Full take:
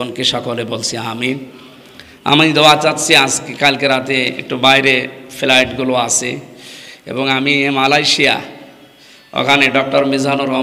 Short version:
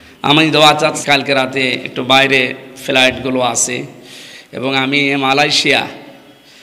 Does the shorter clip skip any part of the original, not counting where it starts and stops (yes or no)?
yes